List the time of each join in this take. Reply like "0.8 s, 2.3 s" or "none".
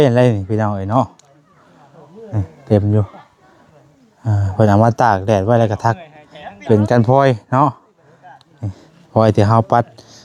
none